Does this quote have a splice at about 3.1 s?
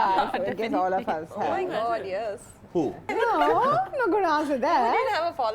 yes; 1 cut; at 3.1 s

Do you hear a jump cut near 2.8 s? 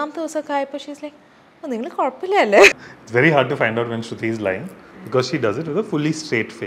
yes; 1 cut; at 2.8 s

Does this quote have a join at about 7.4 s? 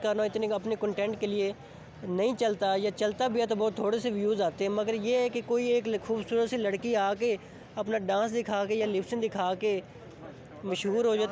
no; 0 cuts

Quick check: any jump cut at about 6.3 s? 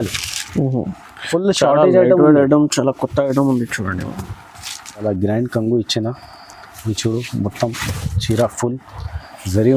no; 1 cut; at 5.0 s

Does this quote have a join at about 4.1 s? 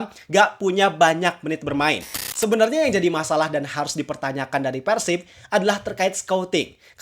no; 1 cut; at 2.2 s

